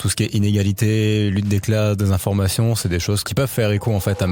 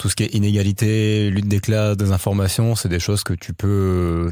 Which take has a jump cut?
first; 1 cut; at 3.3 s

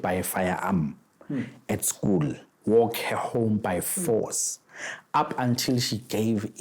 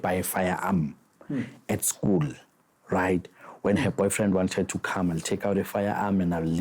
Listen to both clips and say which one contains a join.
first; 1 cut; at 2.5 s

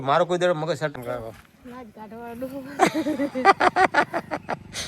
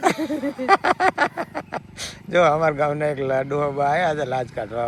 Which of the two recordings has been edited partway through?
first; 1 cut; at 0.9 s

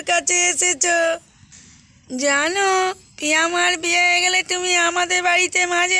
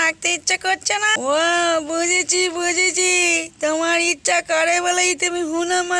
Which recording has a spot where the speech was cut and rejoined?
second; 1 cut; at 1.1 s

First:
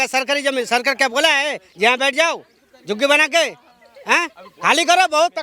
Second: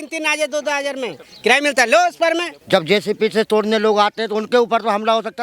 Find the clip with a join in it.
second; 1 cut; at 2.6 s

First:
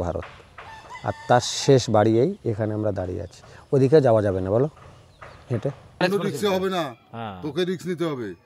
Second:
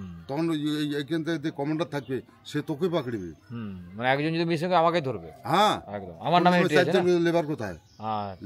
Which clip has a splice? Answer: first; 1 cut; at 6.0 s

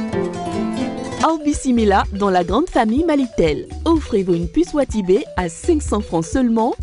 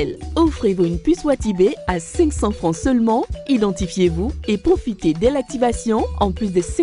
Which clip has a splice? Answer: first; 1 cut; at 1.2 s

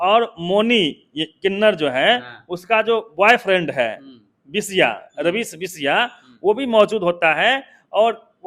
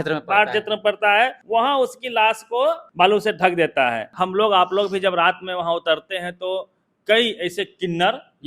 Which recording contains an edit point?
second; 3 cuts; at 1.4 s, 2.9 s, 4.1 s

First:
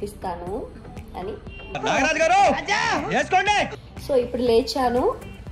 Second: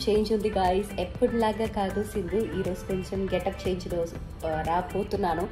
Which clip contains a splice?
first; 2 cuts; at 1.6 s, 3.8 s

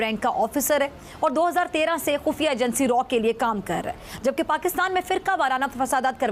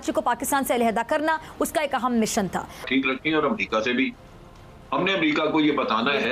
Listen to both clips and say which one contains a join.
second; 1 cut; at 2.8 s

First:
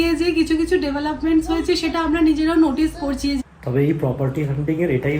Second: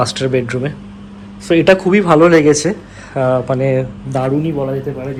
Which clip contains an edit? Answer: first; 1 cut; at 3.4 s

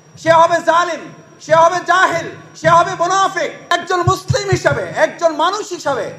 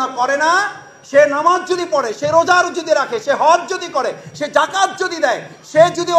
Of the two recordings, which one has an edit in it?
first; 1 cut; at 3.7 s

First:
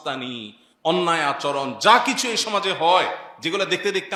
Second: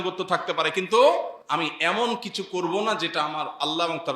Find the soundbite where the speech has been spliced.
second; 1 cut; at 1.4 s

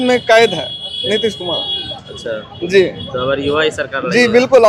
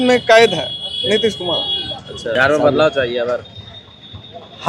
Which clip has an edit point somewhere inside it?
second; 1 cut; at 2.4 s

